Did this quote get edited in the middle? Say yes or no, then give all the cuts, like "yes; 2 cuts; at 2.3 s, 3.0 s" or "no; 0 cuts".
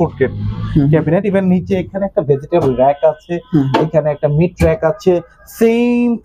no; 0 cuts